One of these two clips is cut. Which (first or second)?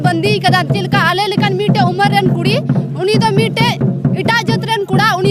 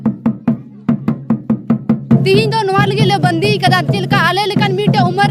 second